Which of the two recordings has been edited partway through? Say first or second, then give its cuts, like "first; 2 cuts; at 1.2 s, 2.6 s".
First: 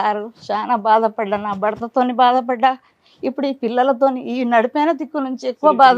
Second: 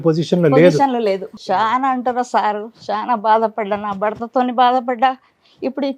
second; 1 cut; at 1.3 s